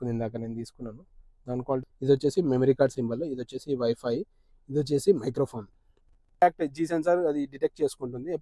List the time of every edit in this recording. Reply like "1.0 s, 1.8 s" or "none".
1.8 s, 6.4 s